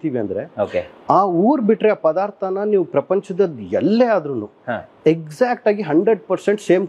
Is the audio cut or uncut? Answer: uncut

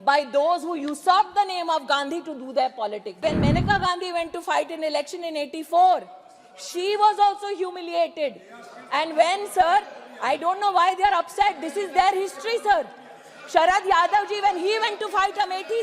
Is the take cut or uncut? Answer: cut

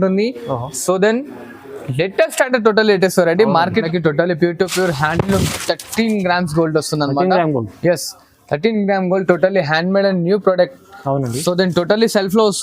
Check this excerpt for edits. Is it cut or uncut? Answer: cut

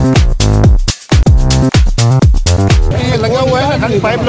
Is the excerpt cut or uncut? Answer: cut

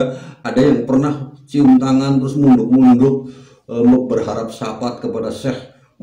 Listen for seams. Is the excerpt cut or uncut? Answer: uncut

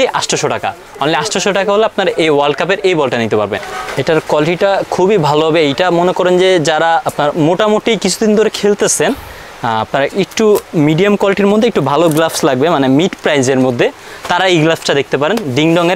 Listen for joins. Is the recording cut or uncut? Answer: cut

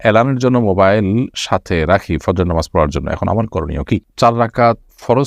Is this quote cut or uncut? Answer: cut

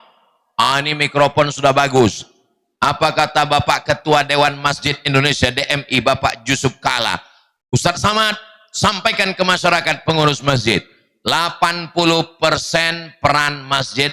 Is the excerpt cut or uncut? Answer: uncut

